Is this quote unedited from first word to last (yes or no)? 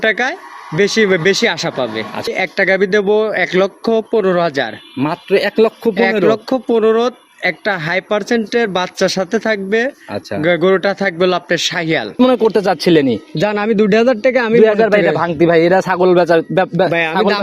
no